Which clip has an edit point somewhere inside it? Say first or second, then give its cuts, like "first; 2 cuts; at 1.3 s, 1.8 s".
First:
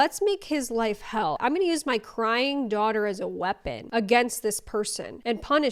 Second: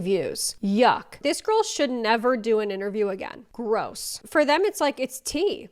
second; 2 cuts; at 1.1 s, 4.3 s